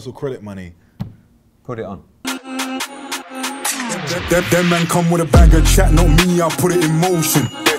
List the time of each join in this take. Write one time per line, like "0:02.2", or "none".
0:02.1